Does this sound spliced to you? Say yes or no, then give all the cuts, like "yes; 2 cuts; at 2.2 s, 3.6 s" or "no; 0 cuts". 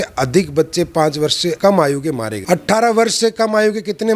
yes; 2 cuts; at 1.6 s, 2.3 s